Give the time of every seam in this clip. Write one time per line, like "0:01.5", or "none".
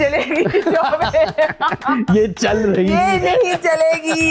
none